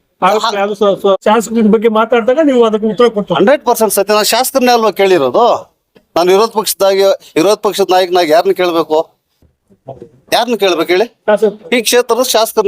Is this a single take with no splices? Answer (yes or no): no